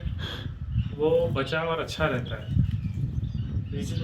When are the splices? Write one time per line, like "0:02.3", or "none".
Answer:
none